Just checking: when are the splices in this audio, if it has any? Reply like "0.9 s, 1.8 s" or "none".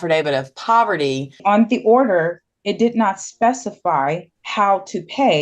1.4 s, 4.4 s

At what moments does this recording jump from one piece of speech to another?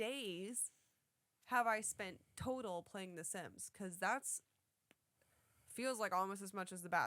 none

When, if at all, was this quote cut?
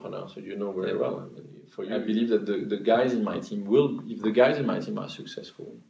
1.8 s

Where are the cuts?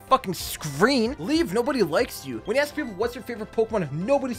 1.2 s, 2.3 s

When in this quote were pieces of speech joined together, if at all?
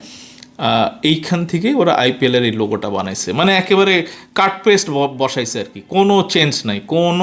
none

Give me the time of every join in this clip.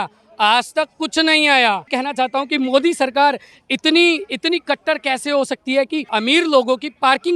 1.9 s, 6.1 s

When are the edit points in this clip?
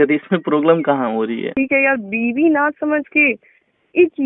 1.5 s

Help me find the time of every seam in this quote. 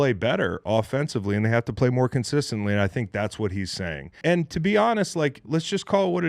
4.2 s

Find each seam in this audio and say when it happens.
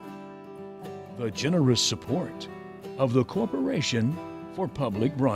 1.2 s

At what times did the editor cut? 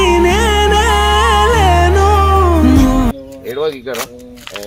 none

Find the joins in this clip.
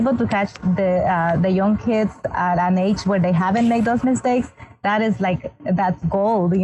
none

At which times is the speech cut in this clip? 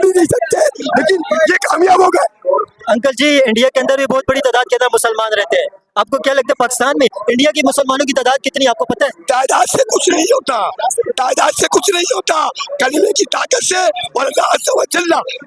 none

